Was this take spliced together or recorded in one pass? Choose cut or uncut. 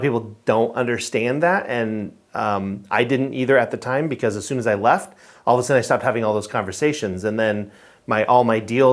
uncut